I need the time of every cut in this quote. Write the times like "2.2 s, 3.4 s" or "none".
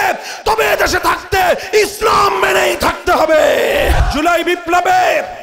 4.0 s